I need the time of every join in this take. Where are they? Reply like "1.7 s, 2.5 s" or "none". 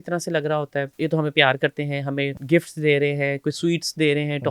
0.9 s, 2.4 s